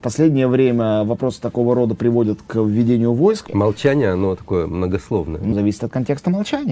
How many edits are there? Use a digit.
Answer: 2